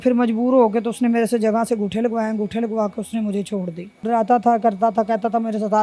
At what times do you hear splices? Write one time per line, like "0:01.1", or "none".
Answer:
0:04.0